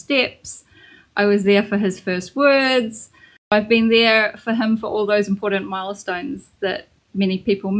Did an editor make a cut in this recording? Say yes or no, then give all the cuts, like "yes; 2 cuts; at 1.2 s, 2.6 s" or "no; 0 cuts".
yes; 1 cut; at 3.5 s